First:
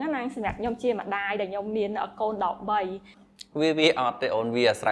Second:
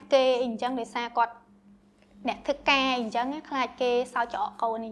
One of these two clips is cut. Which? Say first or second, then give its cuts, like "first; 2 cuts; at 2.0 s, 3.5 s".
first; 1 cut; at 3.1 s